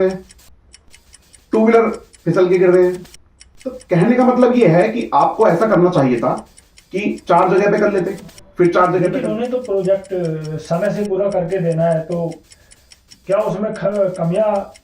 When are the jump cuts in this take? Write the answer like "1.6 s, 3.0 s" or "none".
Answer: 9.2 s

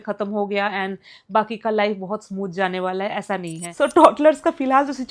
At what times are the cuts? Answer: 3.6 s

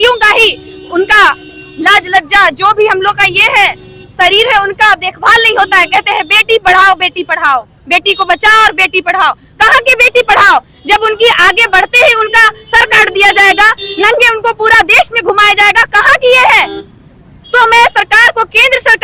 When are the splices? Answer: none

